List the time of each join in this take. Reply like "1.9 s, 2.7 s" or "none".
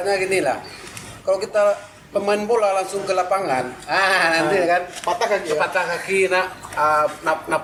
none